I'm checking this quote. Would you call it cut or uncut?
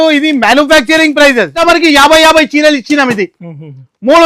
cut